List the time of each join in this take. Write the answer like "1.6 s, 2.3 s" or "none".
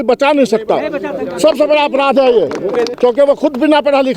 2.9 s